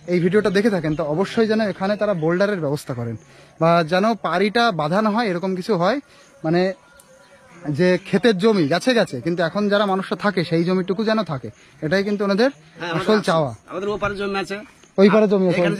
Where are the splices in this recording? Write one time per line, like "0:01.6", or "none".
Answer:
none